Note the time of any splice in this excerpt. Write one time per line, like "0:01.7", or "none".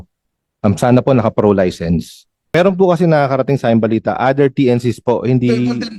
0:02.4